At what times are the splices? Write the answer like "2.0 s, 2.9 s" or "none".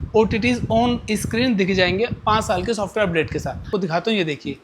3.7 s